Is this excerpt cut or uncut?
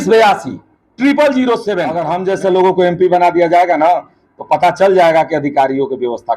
cut